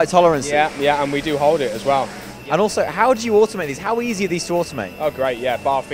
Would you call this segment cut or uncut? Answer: cut